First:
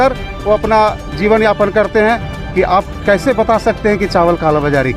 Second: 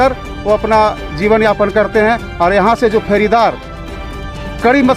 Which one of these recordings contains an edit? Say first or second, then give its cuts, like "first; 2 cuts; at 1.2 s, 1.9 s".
first; 1 cut; at 2.3 s